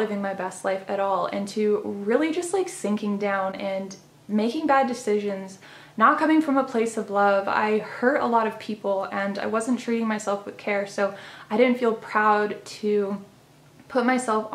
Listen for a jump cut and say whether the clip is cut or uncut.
uncut